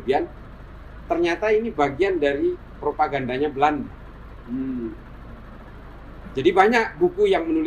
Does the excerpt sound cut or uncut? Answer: uncut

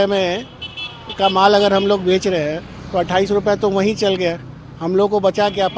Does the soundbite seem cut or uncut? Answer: uncut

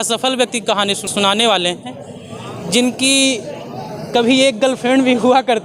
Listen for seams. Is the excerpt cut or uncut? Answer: cut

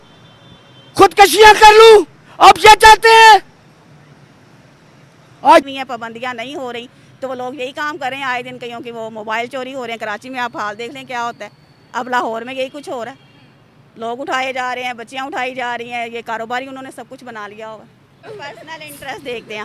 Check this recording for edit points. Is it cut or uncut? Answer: cut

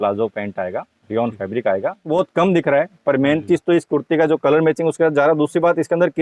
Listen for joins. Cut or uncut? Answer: cut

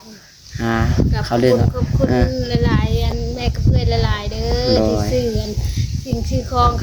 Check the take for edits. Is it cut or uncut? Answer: uncut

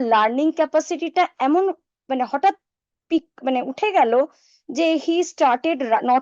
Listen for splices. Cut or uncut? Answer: uncut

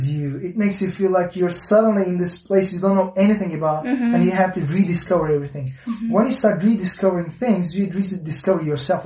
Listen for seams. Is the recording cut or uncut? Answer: uncut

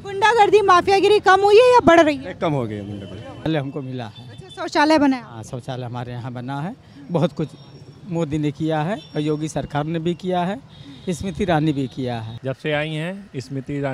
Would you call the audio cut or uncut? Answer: cut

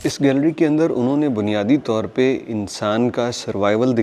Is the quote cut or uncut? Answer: uncut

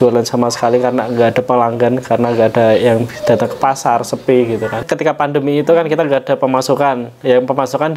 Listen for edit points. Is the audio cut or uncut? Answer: cut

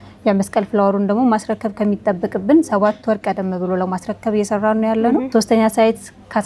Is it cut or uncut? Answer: cut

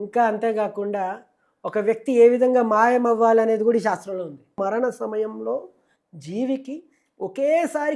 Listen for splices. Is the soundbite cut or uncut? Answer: cut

